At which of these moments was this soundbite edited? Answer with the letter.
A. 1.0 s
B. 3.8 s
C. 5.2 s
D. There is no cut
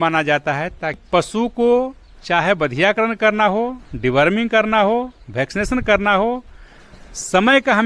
A